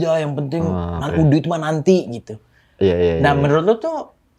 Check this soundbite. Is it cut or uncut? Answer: uncut